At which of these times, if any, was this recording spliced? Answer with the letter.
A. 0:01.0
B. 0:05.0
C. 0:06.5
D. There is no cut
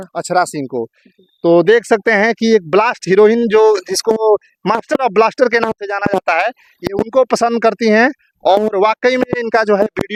D